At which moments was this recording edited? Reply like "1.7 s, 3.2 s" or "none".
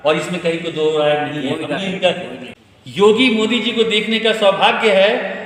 2.4 s